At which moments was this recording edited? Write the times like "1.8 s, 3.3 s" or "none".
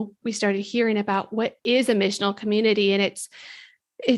1.6 s